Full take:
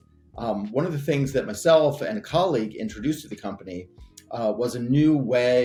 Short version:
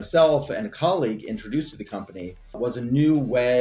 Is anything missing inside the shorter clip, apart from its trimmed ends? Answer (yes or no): yes